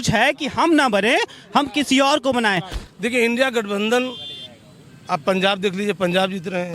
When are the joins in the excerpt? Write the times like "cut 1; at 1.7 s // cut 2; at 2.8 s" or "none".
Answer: cut 1; at 2.7 s